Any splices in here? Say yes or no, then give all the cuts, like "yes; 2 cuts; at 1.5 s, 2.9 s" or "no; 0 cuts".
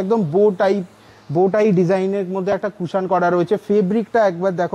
no; 0 cuts